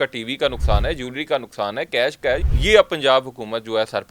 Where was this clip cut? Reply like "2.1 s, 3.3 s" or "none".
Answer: 2.4 s